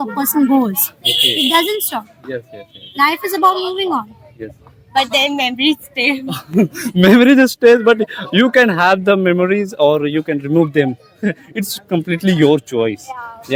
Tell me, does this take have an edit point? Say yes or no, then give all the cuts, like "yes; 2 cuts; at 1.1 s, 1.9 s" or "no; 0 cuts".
no; 0 cuts